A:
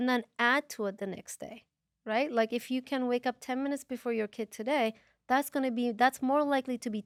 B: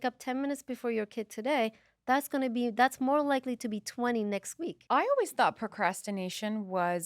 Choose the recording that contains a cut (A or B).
B